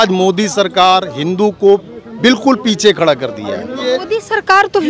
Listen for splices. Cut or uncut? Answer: cut